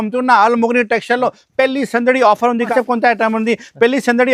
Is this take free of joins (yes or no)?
no